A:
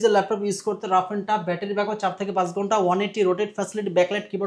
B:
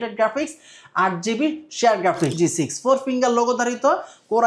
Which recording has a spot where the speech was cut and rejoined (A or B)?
B